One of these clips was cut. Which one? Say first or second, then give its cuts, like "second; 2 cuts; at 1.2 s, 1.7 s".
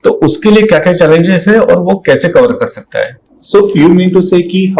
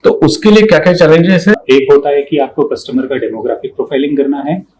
second; 1 cut; at 1.5 s